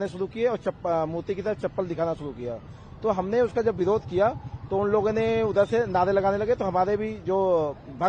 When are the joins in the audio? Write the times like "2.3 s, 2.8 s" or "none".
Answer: none